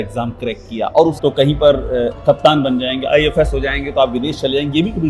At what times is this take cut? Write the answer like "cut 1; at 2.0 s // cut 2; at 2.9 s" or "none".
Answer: cut 1; at 1.2 s